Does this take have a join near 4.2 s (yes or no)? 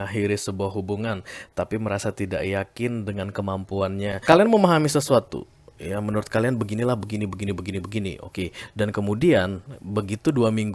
yes